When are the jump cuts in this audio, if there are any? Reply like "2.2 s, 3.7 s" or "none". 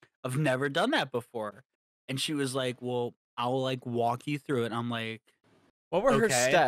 none

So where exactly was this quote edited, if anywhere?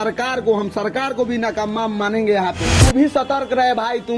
2.7 s

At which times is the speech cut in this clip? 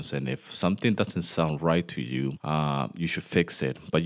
2.4 s

